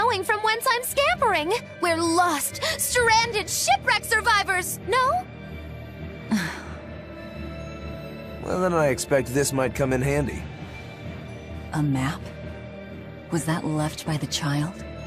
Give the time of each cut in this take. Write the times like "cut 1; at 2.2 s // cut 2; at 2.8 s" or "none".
cut 1; at 10.1 s